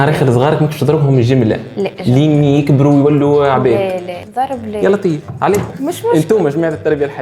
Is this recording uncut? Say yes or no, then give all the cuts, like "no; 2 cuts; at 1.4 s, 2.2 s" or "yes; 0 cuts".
no; 2 cuts; at 4.2 s, 5.7 s